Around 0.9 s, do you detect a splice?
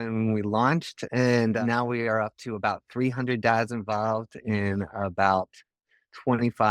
yes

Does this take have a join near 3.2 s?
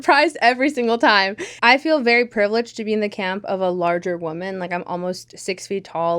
no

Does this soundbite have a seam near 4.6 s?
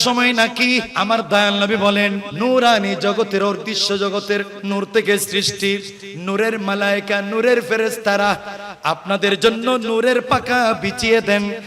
yes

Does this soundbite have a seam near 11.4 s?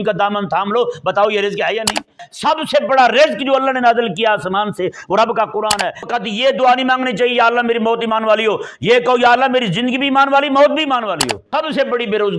yes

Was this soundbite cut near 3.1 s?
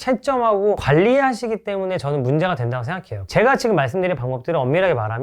yes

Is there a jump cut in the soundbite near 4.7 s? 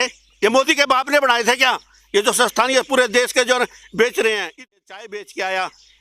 yes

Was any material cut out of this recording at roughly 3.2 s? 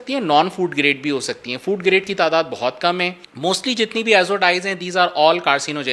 yes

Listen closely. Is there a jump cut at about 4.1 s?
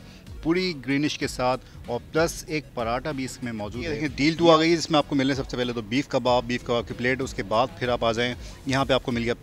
yes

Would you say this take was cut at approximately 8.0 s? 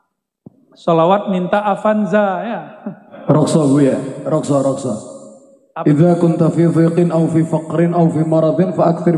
no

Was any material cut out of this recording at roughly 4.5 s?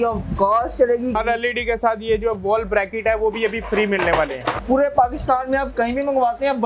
yes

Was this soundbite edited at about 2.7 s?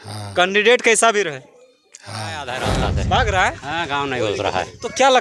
yes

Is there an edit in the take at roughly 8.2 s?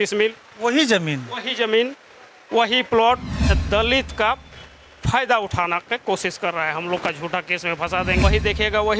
yes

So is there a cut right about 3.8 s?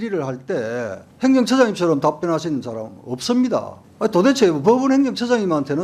yes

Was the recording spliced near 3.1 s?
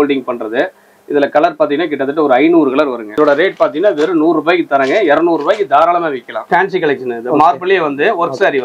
yes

